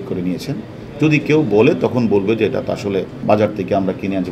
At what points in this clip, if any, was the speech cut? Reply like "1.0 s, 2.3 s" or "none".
3.2 s